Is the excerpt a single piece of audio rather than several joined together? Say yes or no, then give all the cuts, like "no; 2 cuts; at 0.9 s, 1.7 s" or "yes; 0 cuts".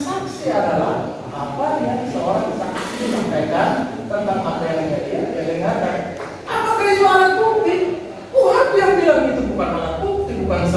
yes; 0 cuts